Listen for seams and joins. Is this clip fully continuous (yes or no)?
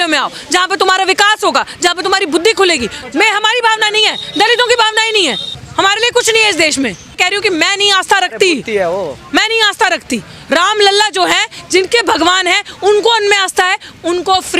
no